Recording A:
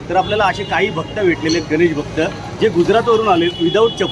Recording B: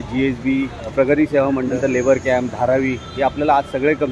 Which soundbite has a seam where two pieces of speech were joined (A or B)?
B